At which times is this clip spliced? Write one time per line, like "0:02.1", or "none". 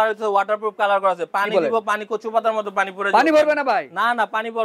none